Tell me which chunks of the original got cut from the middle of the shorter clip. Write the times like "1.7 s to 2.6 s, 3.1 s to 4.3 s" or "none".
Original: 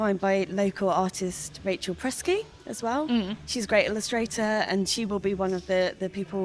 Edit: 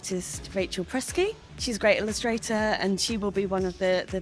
2.6 s to 3.4 s